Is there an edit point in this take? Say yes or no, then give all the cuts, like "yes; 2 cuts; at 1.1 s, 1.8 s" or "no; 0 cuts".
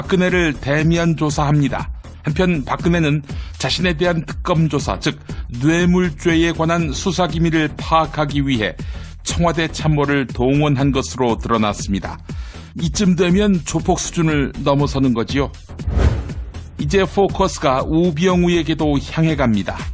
no; 0 cuts